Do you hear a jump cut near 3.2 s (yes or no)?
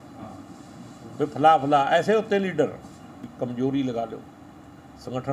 yes